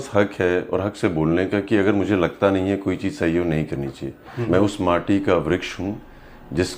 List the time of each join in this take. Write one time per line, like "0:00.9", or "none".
0:04.3

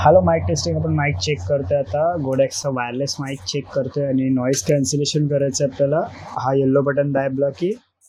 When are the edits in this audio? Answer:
none

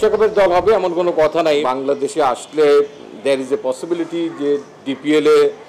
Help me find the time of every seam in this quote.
0:01.6

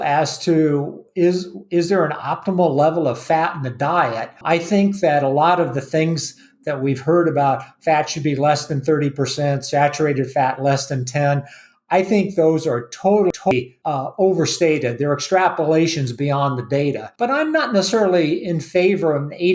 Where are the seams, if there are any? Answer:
0:04.4
0:13.3
0:17.1

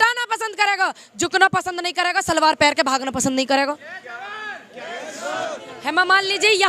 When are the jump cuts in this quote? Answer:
0:05.6

